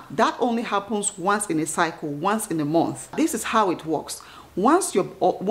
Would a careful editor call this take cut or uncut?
cut